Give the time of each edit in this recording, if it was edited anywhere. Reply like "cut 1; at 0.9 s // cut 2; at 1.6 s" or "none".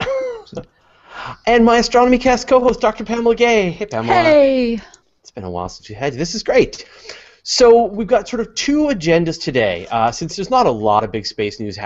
none